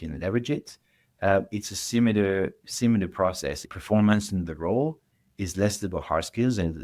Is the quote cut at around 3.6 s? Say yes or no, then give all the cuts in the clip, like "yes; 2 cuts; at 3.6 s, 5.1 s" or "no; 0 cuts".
yes; 1 cut; at 3.6 s